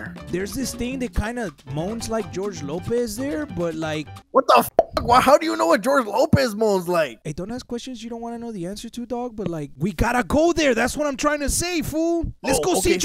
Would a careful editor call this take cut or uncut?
cut